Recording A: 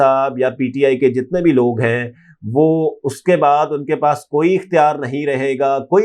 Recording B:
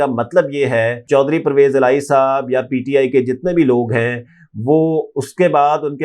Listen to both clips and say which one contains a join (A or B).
B